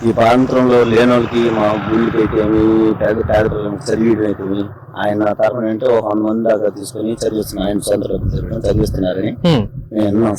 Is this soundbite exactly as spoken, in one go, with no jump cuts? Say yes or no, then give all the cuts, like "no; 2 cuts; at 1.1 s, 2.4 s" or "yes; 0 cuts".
yes; 0 cuts